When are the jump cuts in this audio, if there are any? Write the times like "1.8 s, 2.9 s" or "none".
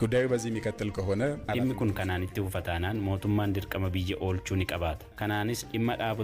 1.5 s, 5.1 s